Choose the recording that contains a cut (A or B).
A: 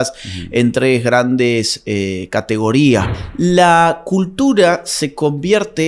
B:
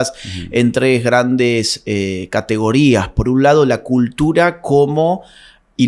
A